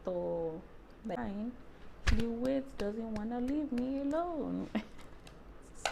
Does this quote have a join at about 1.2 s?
yes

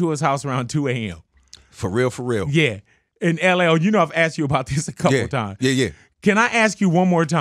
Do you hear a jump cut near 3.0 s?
no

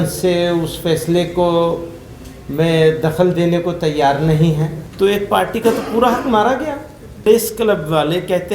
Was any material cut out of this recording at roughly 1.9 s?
no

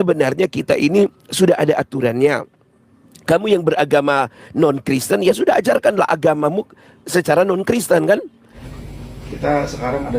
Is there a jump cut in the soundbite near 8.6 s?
yes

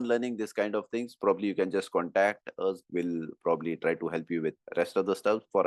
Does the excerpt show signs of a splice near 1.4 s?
no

